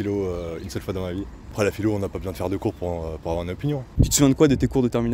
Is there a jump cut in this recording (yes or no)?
yes